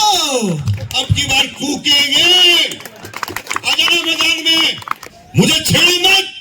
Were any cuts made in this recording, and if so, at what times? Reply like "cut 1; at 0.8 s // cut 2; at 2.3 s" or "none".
cut 1; at 5.1 s